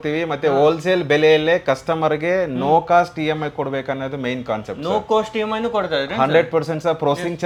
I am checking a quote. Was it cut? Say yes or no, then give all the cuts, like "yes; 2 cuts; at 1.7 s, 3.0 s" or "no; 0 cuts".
no; 0 cuts